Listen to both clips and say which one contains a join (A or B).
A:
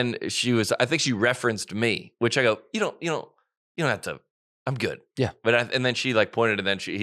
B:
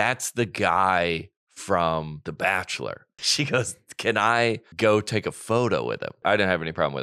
B